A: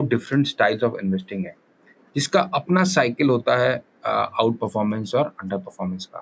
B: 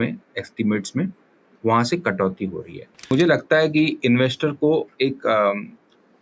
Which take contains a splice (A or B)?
B